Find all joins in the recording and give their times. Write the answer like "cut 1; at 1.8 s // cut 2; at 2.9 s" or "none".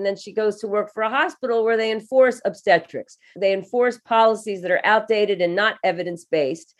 none